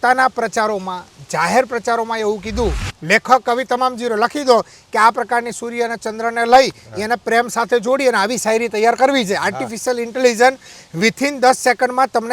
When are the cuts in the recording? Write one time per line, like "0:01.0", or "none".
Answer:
0:02.9